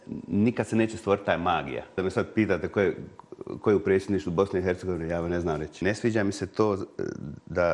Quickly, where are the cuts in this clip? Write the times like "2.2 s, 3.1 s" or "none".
2.0 s, 5.8 s